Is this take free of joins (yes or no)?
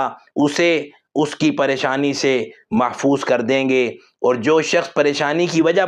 yes